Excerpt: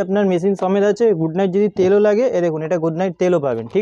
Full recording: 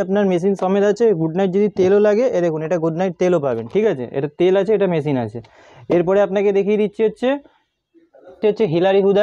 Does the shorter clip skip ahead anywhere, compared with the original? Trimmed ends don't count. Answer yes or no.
no